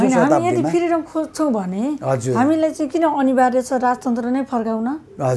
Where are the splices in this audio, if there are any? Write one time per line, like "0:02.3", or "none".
none